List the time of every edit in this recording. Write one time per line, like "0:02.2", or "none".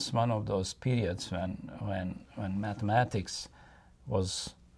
none